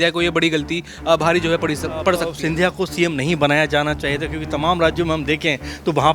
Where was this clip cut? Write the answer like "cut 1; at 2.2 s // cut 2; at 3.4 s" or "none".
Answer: cut 1; at 2.3 s